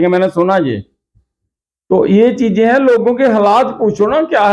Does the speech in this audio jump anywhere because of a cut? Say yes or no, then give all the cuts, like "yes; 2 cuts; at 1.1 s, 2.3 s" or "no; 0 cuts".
no; 0 cuts